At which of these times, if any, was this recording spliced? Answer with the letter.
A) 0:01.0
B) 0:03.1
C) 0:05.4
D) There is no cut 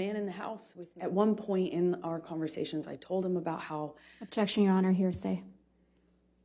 A